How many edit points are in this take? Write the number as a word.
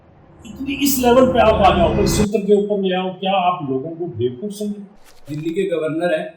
two